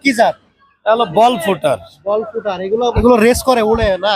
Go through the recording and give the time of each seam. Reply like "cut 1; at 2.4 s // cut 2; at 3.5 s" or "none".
cut 1; at 3.0 s